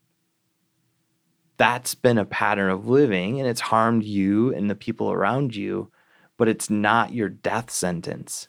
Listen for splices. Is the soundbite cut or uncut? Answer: uncut